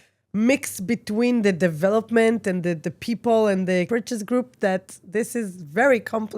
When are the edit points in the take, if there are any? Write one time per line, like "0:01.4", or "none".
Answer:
0:03.9